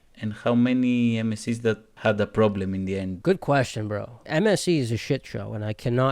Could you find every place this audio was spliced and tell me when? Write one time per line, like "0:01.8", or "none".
0:01.9
0:03.1
0:04.1